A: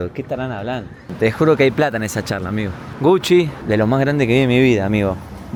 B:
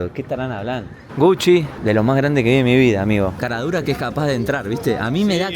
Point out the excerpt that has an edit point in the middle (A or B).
B